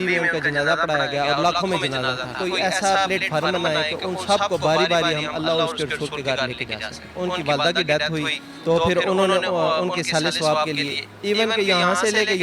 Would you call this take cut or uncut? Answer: cut